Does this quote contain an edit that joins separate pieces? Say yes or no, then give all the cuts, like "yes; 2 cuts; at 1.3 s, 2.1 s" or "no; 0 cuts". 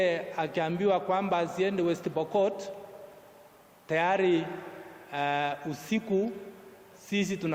no; 0 cuts